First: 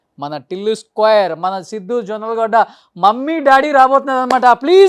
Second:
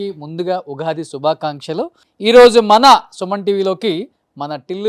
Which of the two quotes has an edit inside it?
second; 1 cut; at 2.1 s

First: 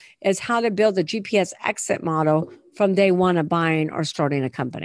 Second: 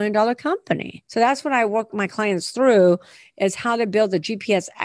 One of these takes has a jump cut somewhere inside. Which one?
second; 2 cuts; at 1.0 s, 1.9 s

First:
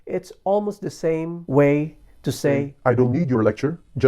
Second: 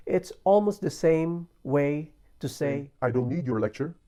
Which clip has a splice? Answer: first; 1 cut; at 1.4 s

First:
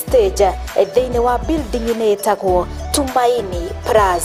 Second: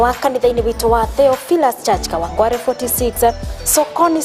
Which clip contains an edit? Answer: second; 1 cut; at 2.4 s

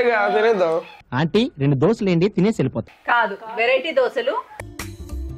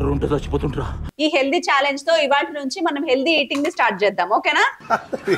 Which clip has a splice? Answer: second; 1 cut; at 1.0 s

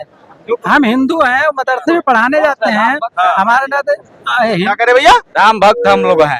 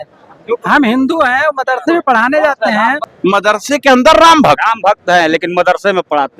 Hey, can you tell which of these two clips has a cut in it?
second; 1 cut; at 3.0 s

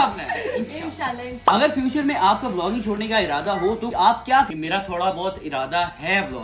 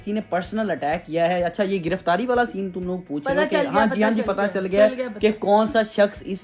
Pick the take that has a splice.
first; 2 cuts; at 1.4 s, 4.5 s

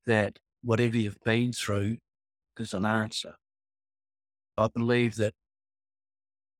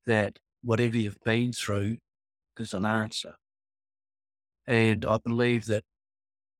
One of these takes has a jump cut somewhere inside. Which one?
first; 1 cut; at 4.6 s

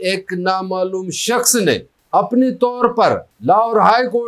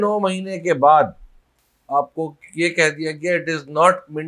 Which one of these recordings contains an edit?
first; 2 cuts; at 1.9 s, 3.3 s

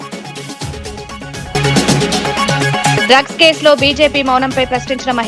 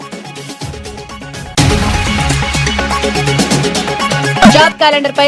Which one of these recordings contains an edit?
first; 2 cuts; at 1.5 s, 3.0 s

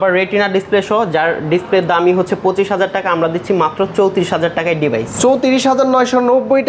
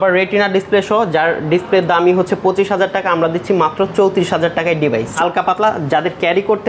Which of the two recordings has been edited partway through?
second; 1 cut; at 5.1 s

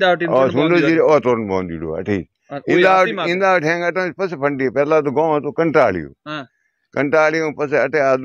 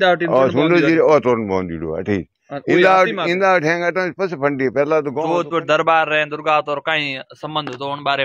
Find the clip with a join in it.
second; 1 cut; at 5.2 s

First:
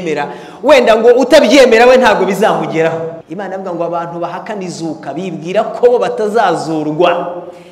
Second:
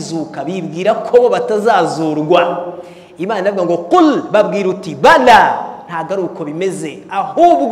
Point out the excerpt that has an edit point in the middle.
first; 1 cut; at 3.2 s

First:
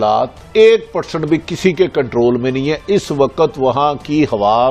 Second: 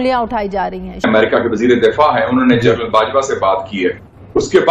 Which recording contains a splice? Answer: second; 1 cut; at 1.0 s

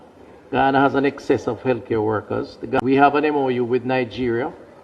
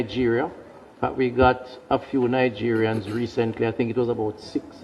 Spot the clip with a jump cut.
first; 1 cut; at 2.7 s

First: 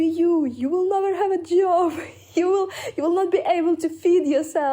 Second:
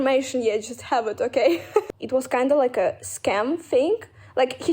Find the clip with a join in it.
second; 1 cut; at 1.9 s

